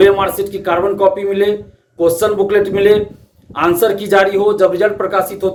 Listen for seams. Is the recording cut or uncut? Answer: uncut